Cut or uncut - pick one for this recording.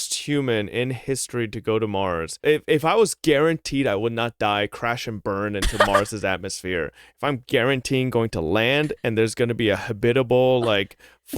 cut